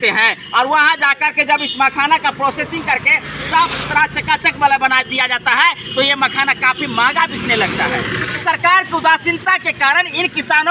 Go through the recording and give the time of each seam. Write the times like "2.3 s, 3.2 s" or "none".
8.2 s